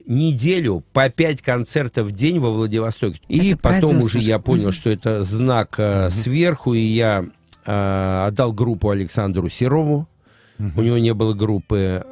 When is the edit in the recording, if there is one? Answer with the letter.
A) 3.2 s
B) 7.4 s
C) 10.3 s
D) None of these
A